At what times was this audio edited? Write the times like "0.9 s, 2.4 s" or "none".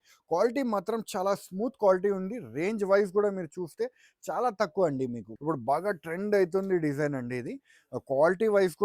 5.3 s